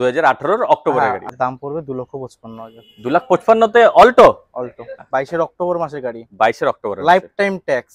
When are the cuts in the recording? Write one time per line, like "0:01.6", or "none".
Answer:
0:01.3
0:05.0